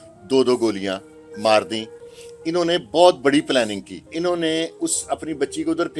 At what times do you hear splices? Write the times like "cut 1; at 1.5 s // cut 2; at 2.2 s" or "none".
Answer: cut 1; at 4.1 s